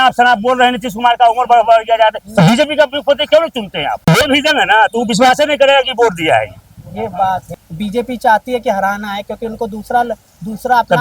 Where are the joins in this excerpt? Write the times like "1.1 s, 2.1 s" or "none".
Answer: 4.1 s, 7.6 s